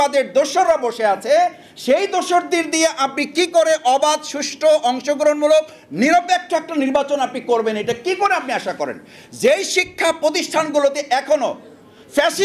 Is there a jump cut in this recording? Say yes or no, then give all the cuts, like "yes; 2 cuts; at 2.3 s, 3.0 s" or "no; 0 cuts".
no; 0 cuts